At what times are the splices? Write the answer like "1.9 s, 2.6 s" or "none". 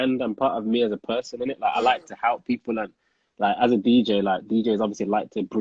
none